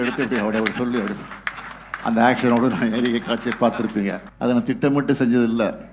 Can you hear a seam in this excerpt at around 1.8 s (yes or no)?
no